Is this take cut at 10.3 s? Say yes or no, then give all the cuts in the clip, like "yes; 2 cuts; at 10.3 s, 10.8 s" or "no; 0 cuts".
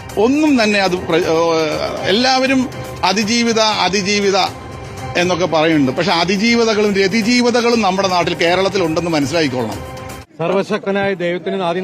yes; 1 cut; at 10.3 s